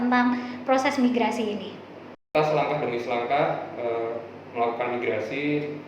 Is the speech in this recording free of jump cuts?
no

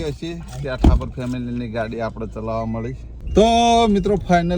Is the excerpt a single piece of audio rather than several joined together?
no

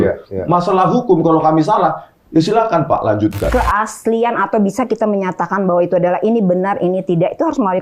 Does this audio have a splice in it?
yes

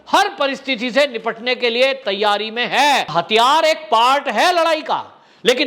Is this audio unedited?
no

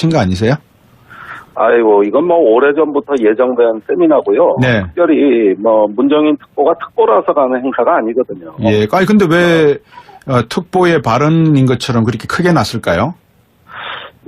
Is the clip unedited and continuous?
no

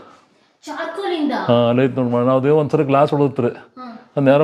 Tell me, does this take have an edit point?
no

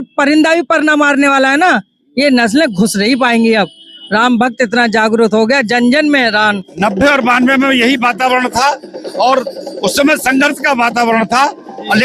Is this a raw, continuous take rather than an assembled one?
no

